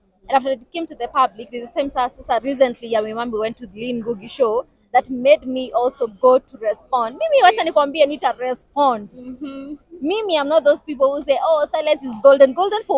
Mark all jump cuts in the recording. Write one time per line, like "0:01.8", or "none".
none